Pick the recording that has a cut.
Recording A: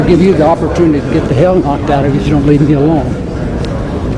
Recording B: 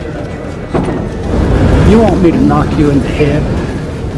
B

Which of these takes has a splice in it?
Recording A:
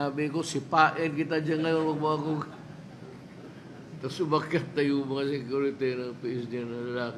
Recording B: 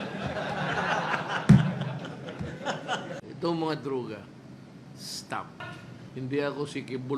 B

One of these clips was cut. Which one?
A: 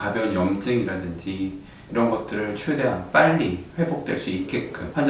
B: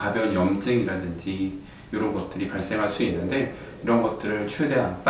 A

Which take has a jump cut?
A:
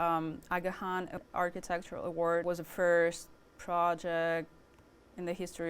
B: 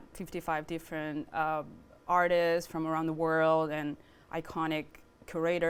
A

